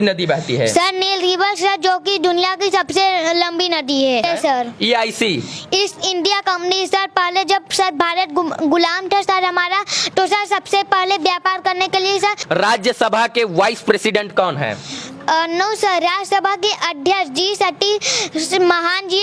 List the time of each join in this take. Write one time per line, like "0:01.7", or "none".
0:04.2
0:12.4